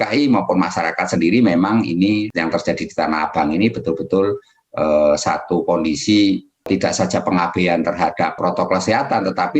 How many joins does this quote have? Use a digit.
3